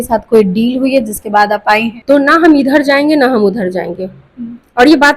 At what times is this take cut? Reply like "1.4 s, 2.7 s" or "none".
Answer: 1.9 s